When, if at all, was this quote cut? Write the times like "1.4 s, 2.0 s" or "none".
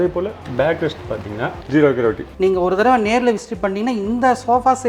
1.6 s, 2.3 s